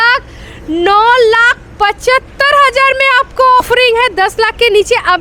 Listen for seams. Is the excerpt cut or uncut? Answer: cut